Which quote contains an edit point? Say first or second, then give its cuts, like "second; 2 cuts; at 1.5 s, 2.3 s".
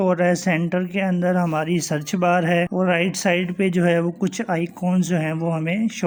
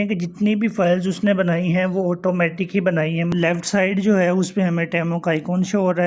second; 1 cut; at 3.3 s